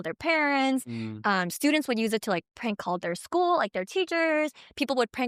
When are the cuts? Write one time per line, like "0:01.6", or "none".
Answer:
none